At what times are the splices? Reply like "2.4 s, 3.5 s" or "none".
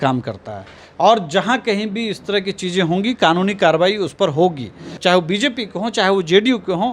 5.0 s